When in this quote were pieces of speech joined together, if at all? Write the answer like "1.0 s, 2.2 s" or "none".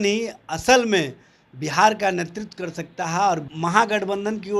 3.5 s